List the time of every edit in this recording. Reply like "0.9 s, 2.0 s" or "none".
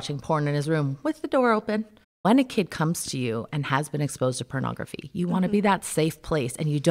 2.1 s